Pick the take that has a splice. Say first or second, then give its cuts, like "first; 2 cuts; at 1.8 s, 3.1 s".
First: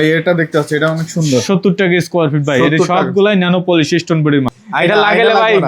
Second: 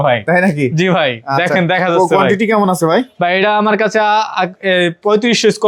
first; 1 cut; at 4.6 s